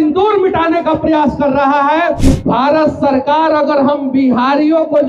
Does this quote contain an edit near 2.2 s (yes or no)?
yes